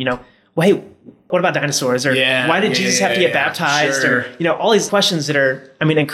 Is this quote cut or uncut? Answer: cut